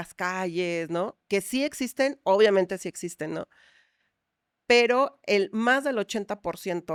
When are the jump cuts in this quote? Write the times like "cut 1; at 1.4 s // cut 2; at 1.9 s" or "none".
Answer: none